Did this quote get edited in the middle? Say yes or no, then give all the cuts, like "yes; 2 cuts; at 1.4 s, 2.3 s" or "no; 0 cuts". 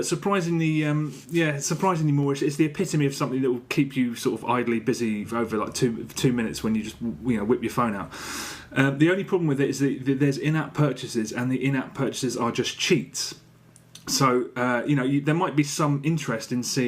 yes; 1 cut; at 7.2 s